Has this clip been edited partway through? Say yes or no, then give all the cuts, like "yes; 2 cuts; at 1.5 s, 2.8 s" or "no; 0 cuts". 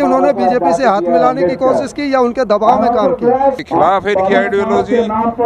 yes; 1 cut; at 3.6 s